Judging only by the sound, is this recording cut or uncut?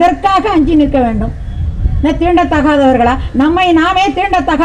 uncut